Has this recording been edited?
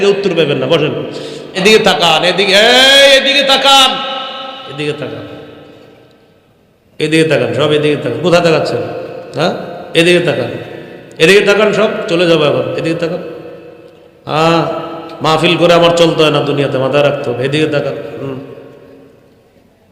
yes; 1 cut; at 1.5 s

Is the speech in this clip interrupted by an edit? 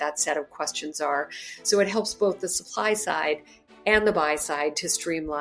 no; 0 cuts

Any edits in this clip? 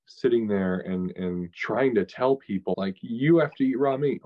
yes; 2 cuts; at 1.5 s, 2.7 s

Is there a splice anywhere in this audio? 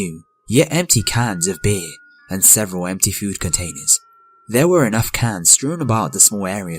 yes; 1 cut; at 1.1 s

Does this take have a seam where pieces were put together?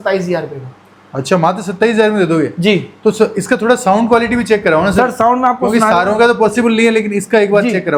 no; 0 cuts

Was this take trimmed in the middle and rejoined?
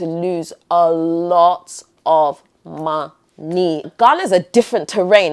yes; 1 cut; at 3.9 s

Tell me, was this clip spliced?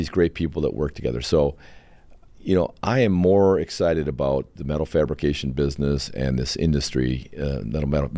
no; 0 cuts

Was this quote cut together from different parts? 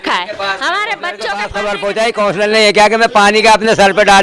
yes; 1 cut; at 1.1 s

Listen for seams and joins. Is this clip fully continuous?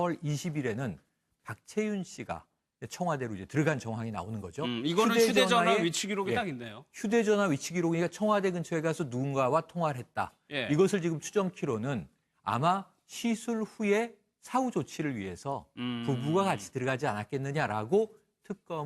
no; 1 cut; at 3.0 s

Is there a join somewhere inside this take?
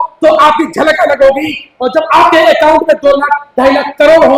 no; 0 cuts

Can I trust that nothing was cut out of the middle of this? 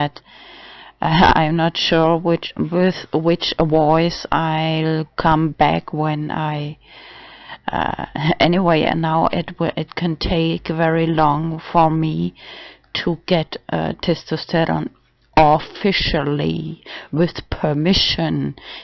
no; 1 cut; at 17.5 s

